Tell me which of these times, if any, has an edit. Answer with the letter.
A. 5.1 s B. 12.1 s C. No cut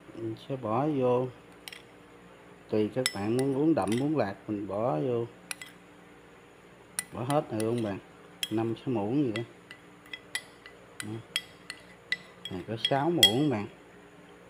C